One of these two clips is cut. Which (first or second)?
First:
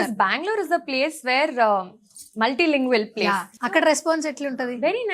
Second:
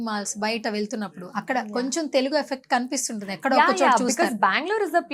first